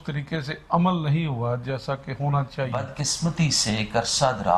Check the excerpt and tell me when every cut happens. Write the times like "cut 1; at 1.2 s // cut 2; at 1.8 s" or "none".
cut 1; at 3.0 s

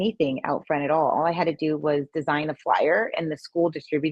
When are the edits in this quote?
none

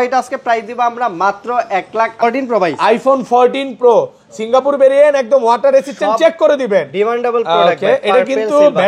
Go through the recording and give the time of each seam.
cut 1; at 2.2 s

